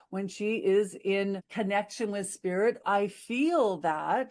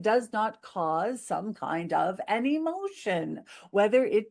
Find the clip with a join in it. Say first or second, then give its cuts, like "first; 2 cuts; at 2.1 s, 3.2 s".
first; 2 cuts; at 1.5 s, 2.8 s